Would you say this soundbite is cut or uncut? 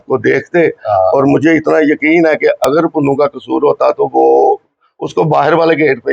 uncut